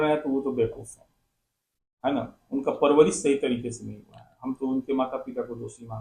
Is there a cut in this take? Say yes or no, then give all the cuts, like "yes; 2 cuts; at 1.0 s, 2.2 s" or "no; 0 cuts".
no; 0 cuts